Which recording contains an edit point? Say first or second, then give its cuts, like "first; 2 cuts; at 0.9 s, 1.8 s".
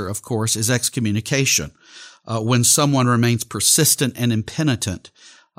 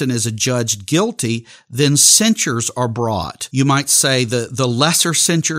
second; 1 cut; at 3.4 s